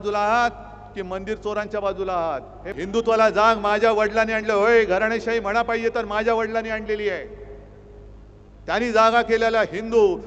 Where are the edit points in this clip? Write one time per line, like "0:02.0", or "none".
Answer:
0:02.8